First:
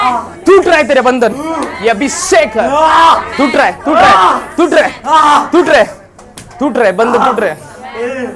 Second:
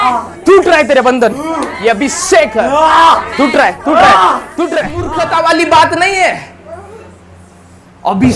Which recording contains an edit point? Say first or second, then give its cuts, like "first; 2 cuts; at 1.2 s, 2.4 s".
second; 1 cut; at 5.0 s